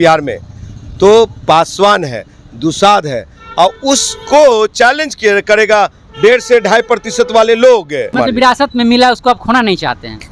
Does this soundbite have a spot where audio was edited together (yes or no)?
yes